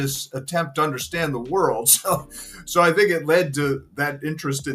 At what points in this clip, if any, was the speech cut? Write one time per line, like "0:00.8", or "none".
none